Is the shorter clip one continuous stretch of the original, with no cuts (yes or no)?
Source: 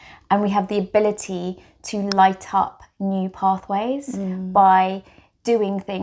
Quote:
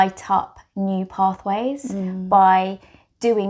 yes